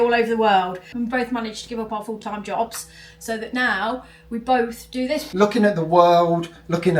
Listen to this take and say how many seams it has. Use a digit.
2